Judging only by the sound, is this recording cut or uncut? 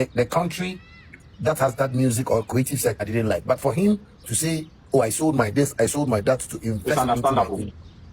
cut